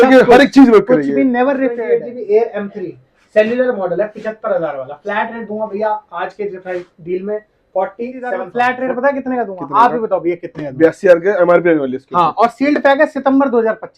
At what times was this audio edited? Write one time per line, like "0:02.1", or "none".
0:01.8
0:08.5